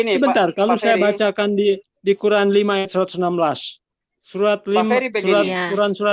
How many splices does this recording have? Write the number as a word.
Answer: zero